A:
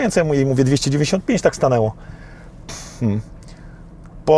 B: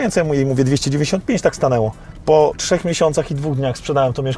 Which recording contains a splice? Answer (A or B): B